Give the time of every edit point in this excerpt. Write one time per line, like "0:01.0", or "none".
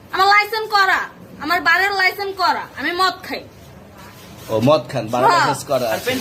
none